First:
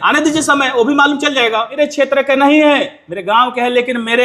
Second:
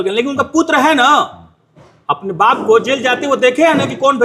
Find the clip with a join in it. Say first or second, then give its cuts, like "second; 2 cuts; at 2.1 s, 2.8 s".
first; 1 cut; at 1.7 s